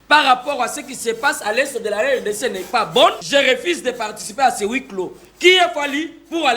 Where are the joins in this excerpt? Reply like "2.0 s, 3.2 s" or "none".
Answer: 3.2 s